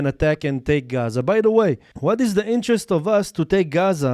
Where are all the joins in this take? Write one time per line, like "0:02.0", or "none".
0:01.9